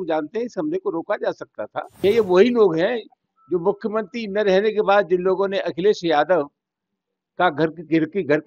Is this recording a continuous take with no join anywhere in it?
no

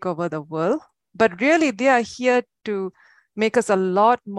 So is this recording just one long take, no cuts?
yes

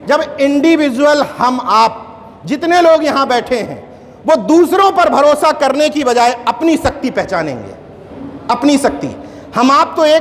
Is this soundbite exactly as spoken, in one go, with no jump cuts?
yes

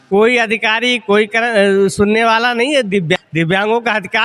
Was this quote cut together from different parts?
yes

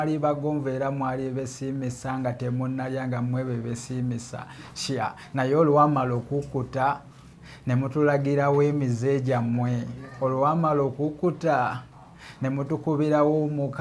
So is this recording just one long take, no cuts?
yes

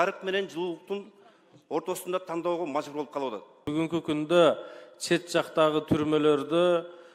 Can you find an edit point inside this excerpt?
yes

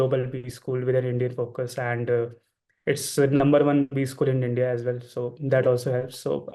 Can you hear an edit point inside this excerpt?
no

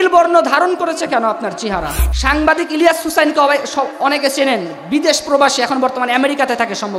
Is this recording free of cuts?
no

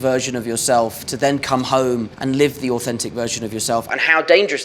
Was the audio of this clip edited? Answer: no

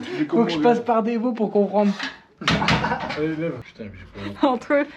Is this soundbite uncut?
no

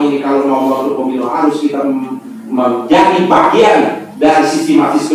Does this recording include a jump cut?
no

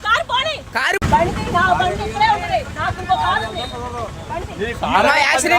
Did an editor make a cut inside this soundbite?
yes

